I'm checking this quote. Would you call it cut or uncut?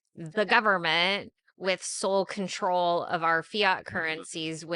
uncut